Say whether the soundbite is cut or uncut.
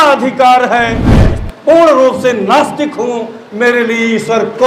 cut